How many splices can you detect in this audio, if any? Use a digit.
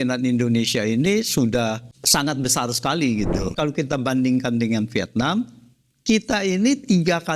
2